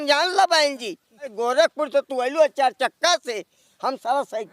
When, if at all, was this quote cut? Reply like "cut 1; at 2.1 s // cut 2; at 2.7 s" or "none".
cut 1; at 1.3 s